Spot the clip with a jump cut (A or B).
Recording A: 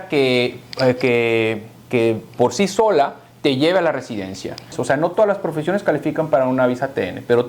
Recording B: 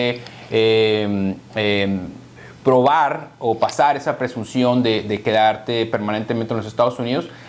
A